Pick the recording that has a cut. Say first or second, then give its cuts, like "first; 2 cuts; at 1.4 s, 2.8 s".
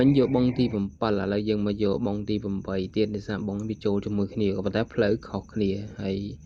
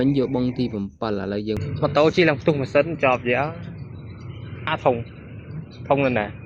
second; 1 cut; at 1.6 s